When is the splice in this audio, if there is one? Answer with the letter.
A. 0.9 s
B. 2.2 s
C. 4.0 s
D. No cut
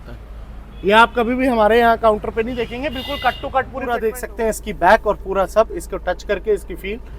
C